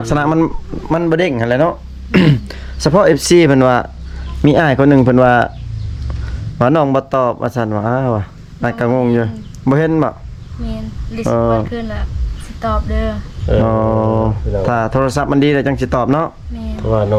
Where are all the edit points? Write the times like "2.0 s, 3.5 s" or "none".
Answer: none